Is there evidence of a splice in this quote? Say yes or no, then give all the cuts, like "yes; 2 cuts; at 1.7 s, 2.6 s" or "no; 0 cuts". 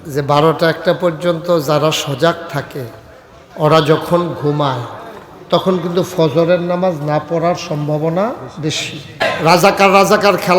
yes; 1 cut; at 9.3 s